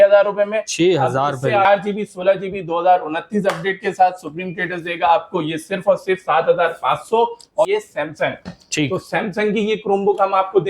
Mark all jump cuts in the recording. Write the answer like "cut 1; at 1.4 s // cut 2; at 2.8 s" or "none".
cut 1; at 1.7 s // cut 2; at 7.6 s